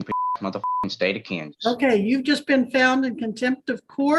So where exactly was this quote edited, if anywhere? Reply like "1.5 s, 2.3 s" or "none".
none